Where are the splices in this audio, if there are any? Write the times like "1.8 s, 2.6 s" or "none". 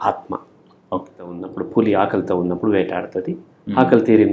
1.5 s